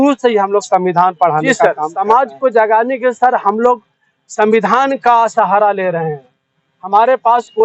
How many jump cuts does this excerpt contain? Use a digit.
1